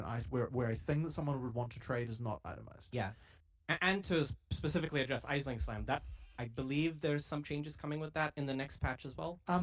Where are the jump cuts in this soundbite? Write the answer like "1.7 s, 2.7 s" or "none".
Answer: 1.4 s, 4.8 s